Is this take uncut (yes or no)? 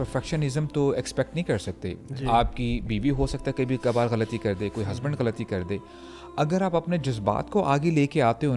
yes